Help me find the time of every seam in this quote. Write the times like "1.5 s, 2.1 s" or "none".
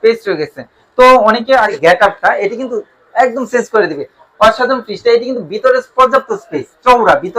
1.7 s